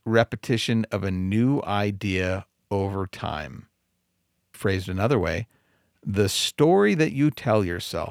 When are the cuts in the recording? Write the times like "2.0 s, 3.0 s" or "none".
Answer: 4.5 s